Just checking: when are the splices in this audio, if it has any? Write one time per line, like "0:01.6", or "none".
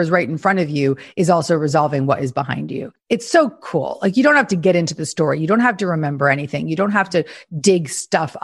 0:02.9